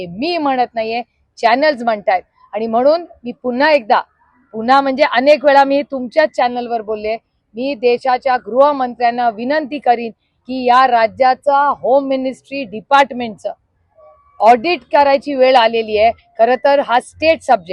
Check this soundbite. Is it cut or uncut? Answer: uncut